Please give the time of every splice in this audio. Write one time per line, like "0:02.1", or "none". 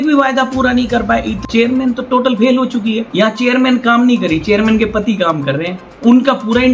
0:01.4
0:03.1
0:05.8